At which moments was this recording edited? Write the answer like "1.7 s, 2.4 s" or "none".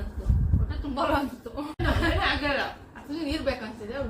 1.8 s